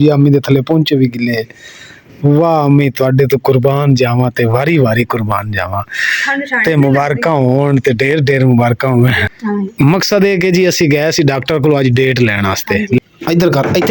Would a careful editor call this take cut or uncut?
cut